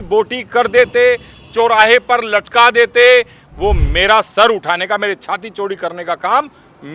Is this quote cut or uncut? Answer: cut